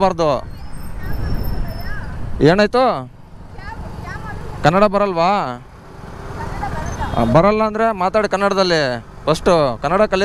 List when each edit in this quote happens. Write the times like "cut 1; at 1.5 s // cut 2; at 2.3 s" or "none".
none